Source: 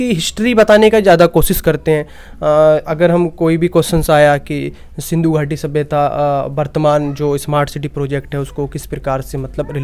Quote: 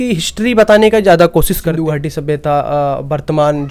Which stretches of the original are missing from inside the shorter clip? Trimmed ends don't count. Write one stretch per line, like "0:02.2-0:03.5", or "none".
0:01.7-0:05.1